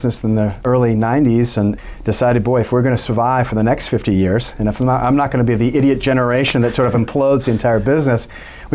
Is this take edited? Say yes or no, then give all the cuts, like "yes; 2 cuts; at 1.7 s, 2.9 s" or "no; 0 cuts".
no; 0 cuts